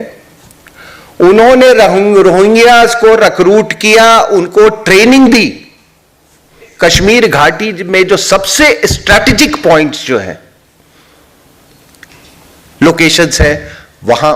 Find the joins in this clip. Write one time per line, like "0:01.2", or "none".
0:06.6